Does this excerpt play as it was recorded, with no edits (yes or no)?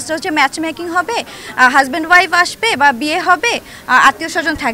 yes